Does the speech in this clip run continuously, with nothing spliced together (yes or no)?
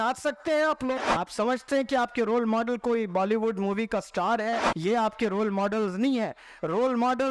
no